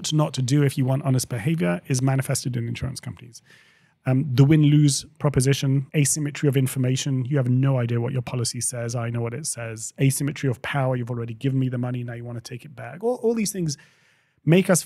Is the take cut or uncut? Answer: cut